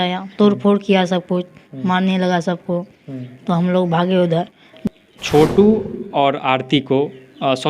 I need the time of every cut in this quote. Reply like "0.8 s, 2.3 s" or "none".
4.7 s